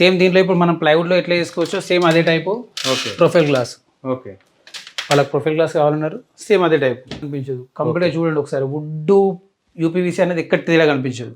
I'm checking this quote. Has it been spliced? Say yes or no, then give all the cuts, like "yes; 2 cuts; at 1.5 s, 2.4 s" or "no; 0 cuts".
yes; 1 cut; at 7.3 s